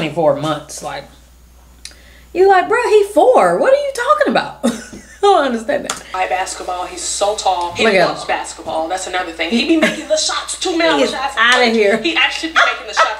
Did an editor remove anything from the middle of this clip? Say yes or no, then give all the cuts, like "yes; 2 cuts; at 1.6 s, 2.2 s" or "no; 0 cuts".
yes; 1 cut; at 6.0 s